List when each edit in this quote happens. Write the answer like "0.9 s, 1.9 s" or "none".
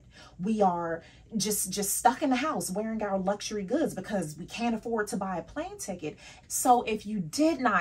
6.3 s